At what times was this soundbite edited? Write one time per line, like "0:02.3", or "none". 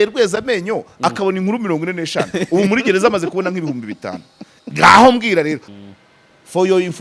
0:05.6